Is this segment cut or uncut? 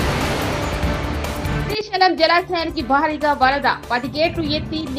uncut